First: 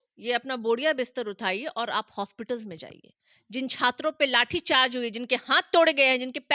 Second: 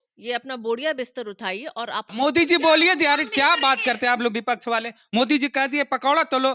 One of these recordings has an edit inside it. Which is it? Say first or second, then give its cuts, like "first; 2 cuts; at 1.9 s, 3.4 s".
second; 1 cut; at 2.1 s